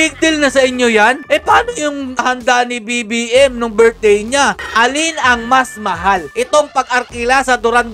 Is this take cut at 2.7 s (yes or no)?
no